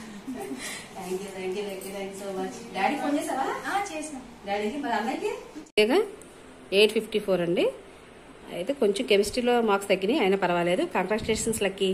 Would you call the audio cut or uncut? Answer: cut